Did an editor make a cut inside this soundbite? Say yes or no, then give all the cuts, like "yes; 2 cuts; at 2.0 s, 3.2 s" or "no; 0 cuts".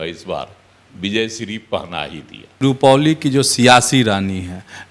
yes; 1 cut; at 2.6 s